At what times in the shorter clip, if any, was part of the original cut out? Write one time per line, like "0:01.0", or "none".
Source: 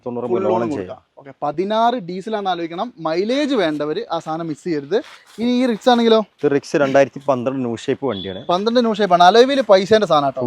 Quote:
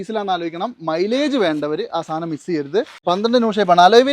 0:02.9